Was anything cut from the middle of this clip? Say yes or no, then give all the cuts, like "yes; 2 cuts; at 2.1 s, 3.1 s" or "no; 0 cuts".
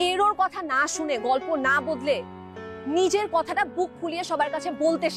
no; 0 cuts